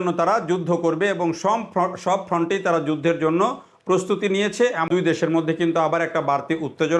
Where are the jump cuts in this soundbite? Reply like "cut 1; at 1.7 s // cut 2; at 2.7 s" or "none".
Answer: cut 1; at 4.9 s